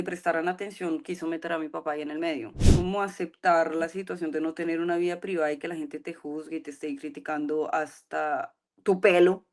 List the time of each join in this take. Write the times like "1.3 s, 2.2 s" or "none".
2.6 s

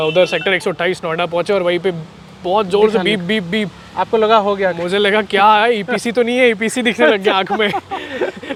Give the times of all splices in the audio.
none

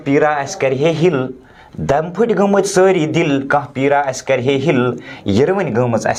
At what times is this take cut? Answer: none

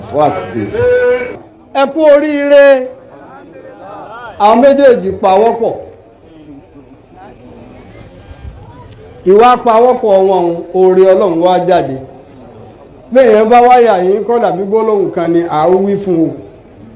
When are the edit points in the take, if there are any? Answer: 1.4 s

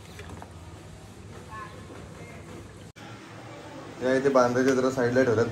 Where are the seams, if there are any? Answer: 3.0 s

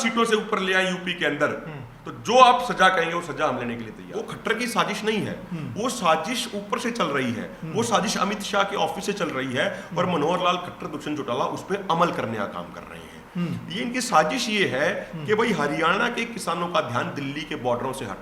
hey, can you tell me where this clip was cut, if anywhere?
4.0 s

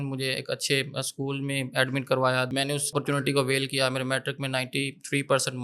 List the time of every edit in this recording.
2.9 s

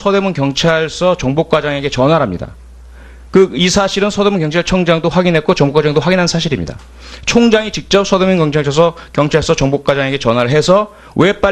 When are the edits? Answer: 2.3 s

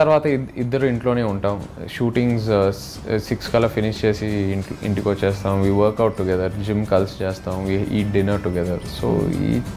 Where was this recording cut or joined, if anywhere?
none

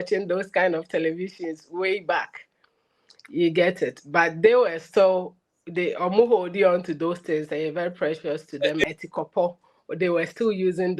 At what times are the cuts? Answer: 8.8 s

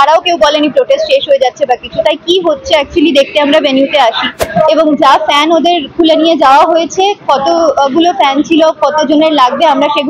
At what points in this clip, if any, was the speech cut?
4.4 s

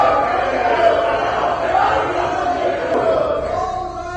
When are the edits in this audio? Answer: 3.0 s

